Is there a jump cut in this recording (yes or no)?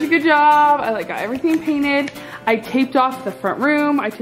no